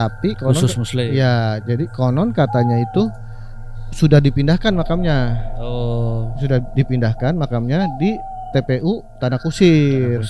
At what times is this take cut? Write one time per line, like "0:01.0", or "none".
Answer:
none